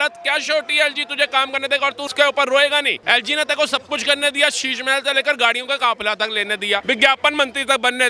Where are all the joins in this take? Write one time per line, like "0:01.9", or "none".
0:02.1
0:03.0
0:06.8